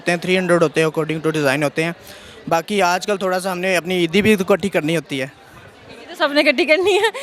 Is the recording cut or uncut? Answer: uncut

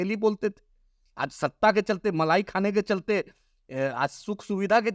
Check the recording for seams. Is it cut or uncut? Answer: uncut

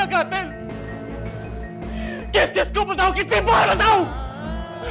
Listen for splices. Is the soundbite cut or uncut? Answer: uncut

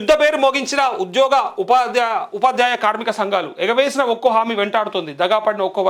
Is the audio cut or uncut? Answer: uncut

